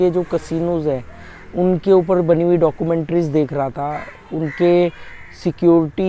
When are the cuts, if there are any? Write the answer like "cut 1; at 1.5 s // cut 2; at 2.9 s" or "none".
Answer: none